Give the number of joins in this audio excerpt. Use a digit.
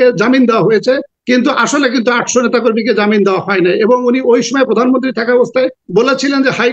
2